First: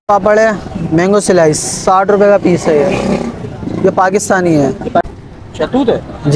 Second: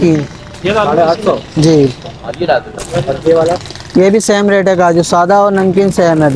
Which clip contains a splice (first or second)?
first